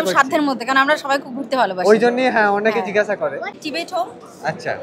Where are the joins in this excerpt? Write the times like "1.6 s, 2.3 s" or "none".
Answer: none